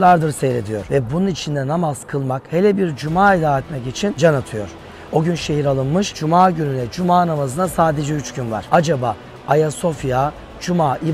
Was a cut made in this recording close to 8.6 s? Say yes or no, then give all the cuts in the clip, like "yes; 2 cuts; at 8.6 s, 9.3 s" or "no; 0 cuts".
yes; 4 cuts; at 0.8 s, 4.2 s, 6.2 s, 8.6 s